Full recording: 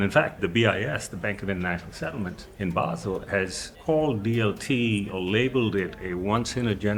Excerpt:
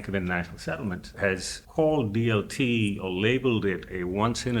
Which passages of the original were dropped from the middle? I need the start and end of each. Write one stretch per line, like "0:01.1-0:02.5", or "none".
0:02.5-0:03.2